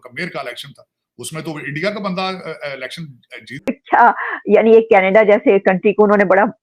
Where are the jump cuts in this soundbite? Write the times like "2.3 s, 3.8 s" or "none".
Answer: 3.6 s